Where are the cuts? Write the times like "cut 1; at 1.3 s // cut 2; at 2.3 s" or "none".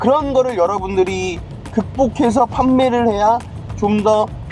none